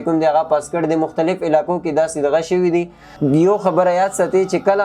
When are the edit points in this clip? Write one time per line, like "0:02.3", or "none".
0:03.1